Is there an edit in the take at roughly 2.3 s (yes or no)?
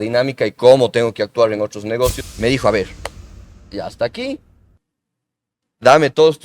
yes